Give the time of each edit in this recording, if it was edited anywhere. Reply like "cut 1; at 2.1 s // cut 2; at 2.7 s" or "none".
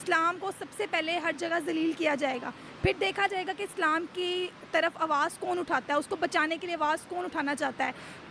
none